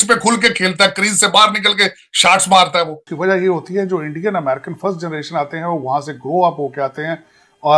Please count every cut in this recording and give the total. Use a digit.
1